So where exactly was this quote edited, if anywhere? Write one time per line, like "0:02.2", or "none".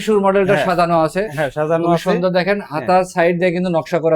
none